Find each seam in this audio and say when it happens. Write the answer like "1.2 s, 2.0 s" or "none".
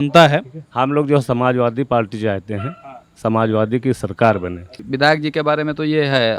4.8 s

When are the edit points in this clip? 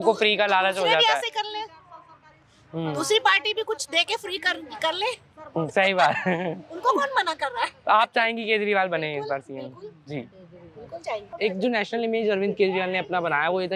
11.3 s

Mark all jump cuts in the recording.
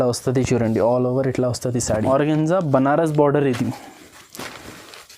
2.1 s

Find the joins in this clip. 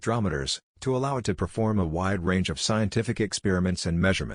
none

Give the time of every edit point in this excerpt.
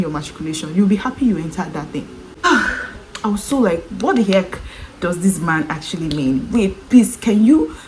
2.3 s

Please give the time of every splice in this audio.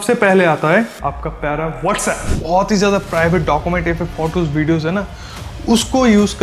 2.3 s

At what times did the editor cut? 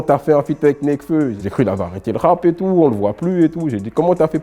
1.4 s

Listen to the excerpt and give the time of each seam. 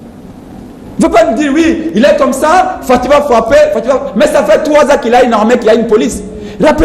none

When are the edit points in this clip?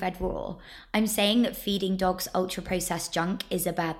none

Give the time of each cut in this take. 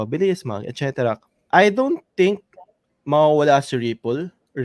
1.3 s

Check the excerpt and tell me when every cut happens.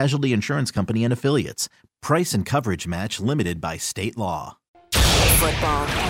4.7 s

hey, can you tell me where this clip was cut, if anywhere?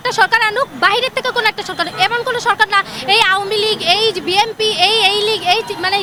none

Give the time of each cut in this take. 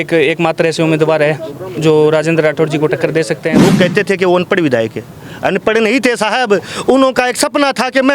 3.6 s

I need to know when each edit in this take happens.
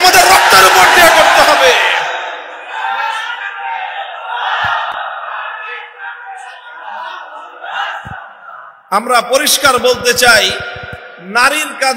none

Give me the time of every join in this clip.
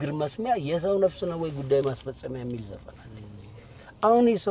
none

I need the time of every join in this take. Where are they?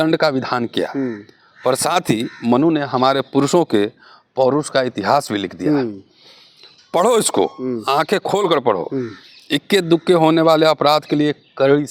none

